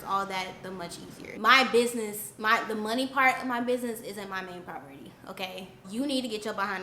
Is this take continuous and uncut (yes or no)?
no